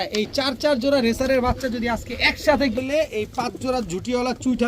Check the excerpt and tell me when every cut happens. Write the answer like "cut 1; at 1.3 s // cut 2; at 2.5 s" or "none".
cut 1; at 2.8 s